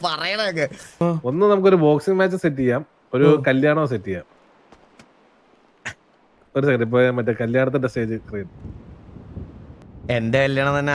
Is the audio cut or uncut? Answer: cut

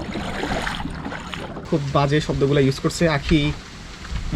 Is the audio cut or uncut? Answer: cut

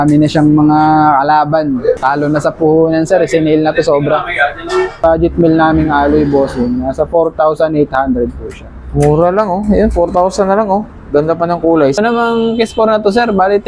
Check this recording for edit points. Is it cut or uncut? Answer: cut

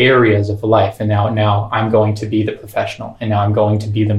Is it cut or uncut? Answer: uncut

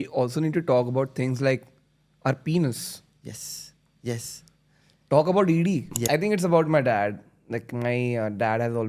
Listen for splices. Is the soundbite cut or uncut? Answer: cut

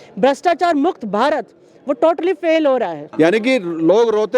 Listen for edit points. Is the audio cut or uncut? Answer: cut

